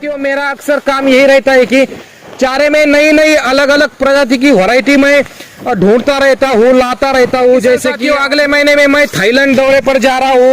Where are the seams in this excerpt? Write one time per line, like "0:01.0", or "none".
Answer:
0:07.9